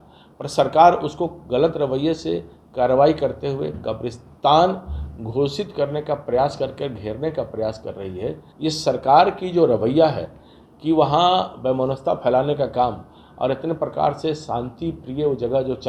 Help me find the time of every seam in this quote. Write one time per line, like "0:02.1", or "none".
0:08.5